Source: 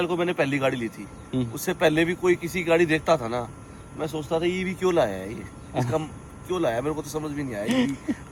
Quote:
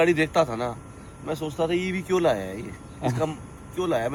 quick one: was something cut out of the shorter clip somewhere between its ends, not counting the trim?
no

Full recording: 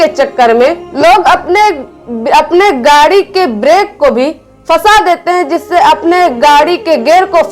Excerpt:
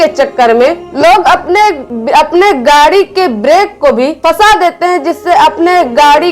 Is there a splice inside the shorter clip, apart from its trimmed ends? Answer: yes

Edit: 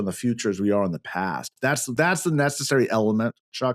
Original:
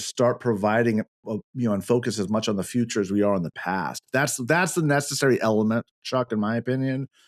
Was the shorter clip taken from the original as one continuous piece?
yes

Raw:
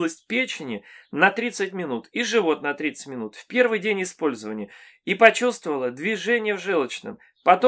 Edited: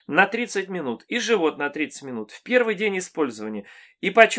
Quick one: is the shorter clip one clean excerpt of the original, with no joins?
yes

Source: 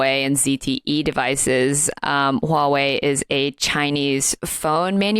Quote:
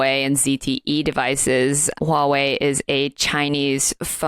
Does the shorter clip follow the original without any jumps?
no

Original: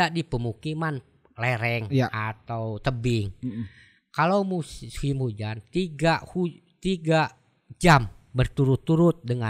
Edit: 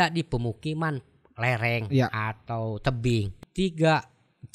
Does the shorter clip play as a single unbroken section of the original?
no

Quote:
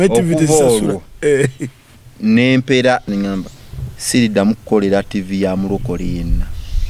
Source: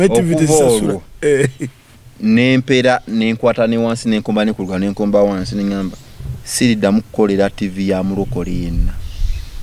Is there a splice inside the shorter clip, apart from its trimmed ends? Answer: yes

